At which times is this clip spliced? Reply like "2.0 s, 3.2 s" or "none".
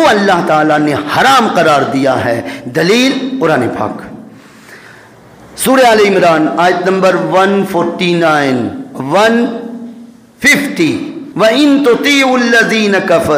11.2 s